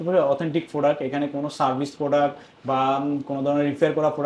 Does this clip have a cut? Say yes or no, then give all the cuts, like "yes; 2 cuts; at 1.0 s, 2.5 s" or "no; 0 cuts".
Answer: no; 0 cuts